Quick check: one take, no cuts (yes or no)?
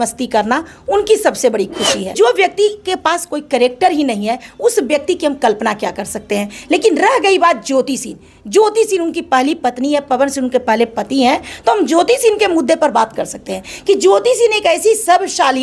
no